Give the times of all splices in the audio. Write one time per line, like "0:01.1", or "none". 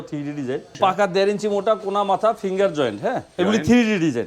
0:00.8
0:03.3